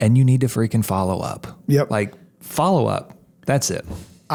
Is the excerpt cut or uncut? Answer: uncut